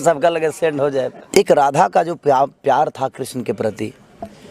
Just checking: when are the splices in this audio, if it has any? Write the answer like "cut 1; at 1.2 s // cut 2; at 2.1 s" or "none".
cut 1; at 1.2 s